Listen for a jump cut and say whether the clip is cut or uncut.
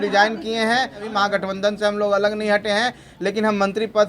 cut